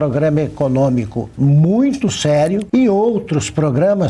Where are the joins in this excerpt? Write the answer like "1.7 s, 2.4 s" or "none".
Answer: 2.6 s